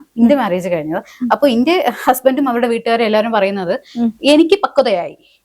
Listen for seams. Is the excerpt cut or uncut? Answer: uncut